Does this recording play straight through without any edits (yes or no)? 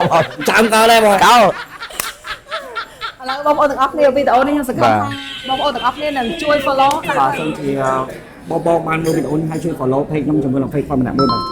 no